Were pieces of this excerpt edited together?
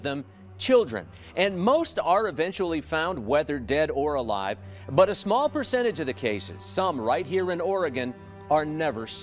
no; 0 cuts

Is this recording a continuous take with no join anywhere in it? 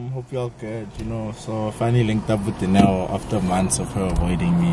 yes; 0 cuts

